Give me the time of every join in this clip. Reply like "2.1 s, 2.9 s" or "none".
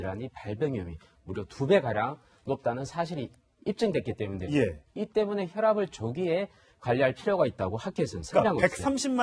7.2 s